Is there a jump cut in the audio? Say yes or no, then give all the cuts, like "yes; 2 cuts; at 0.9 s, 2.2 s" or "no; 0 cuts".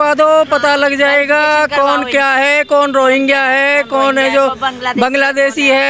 no; 0 cuts